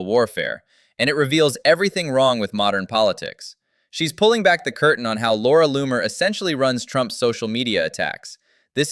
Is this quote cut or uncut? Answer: uncut